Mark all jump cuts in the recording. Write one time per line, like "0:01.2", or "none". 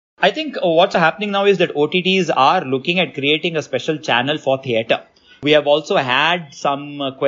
0:00.9
0:05.4